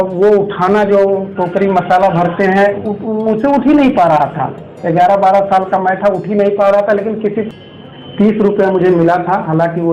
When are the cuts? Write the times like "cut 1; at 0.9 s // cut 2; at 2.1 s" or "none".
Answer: cut 1; at 7.5 s